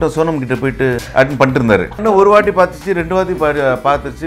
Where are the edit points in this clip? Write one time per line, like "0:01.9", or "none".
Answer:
0:01.0
0:02.1

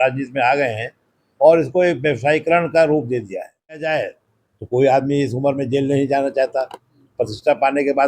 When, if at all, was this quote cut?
0:03.8

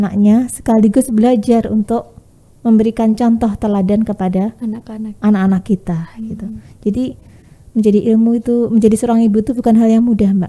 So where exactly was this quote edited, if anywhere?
none

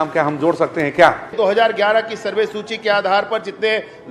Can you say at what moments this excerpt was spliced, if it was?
0:01.3

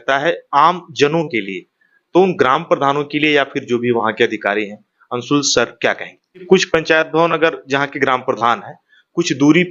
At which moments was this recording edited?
0:06.4

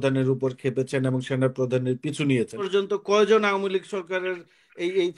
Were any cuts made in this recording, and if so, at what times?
0:02.6

